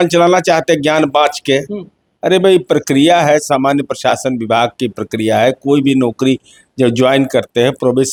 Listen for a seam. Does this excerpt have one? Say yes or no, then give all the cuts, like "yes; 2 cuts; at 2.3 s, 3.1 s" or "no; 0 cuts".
no; 0 cuts